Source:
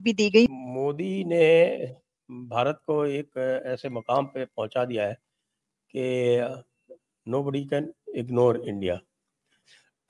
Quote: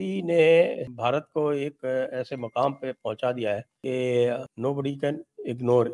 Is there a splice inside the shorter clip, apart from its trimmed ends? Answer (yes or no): yes